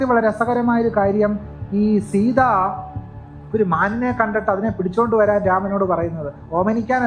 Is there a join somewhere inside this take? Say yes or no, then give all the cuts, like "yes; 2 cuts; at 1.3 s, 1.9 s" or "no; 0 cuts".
no; 0 cuts